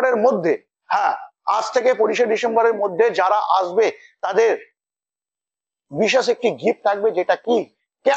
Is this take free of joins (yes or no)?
yes